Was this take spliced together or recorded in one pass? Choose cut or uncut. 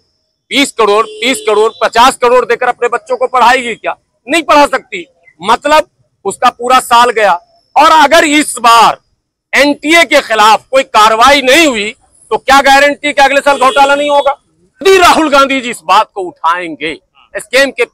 cut